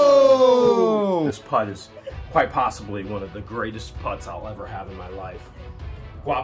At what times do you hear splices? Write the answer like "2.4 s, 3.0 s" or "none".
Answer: 1.4 s